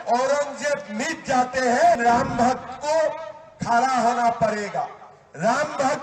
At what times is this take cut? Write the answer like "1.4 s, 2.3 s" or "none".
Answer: 2.0 s